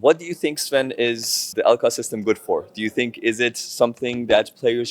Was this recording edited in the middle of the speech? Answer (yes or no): yes